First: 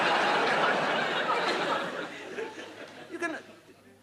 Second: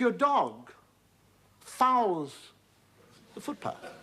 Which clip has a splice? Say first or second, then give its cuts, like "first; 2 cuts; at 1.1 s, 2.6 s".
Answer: second; 1 cut; at 2.2 s